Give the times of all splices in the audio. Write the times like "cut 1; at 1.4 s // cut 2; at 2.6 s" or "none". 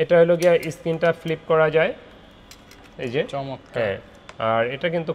none